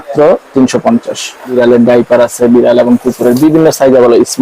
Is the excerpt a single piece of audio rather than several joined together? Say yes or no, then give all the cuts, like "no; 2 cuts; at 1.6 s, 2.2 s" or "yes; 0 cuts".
no; 1 cut; at 1.5 s